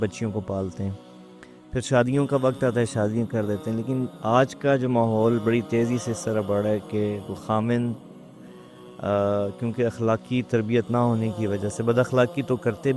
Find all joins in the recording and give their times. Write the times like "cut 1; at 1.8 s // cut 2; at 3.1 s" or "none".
none

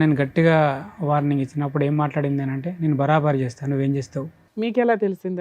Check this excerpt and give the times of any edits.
cut 1; at 4.4 s

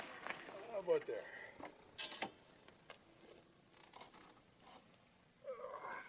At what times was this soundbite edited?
none

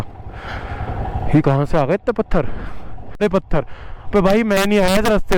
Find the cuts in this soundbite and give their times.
cut 1; at 3.2 s

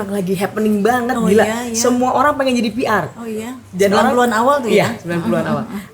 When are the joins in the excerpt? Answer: none

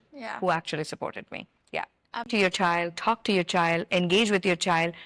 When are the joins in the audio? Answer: cut 1; at 2.3 s

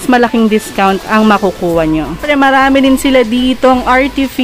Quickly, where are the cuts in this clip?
cut 1; at 2.2 s

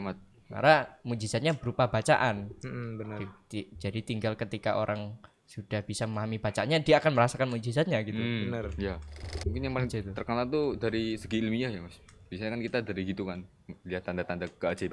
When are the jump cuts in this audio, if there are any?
cut 1; at 9.3 s

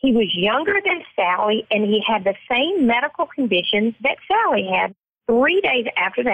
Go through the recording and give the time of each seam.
cut 1; at 5.1 s

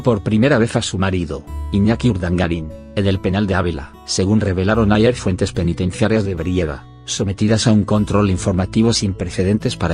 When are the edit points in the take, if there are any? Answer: cut 1; at 5.7 s

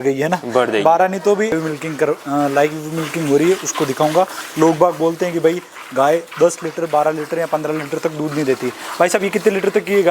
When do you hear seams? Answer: cut 1; at 1.5 s

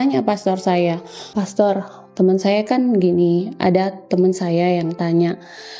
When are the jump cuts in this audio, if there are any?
cut 1; at 1.3 s

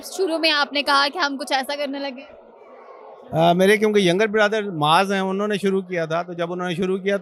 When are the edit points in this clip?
none

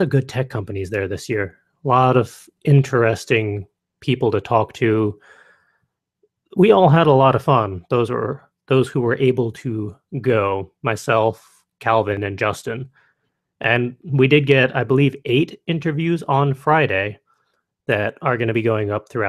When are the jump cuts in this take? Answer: none

